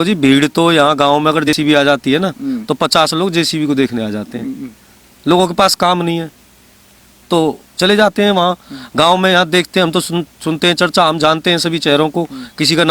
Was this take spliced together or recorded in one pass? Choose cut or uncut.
cut